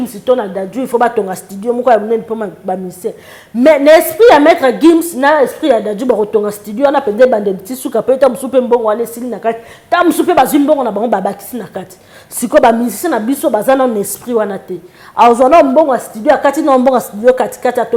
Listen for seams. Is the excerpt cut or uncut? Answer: uncut